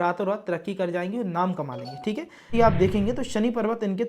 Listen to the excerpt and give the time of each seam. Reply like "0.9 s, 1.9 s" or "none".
2.5 s